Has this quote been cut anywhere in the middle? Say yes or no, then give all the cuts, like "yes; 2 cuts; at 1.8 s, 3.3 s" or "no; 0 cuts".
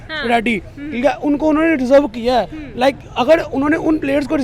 no; 0 cuts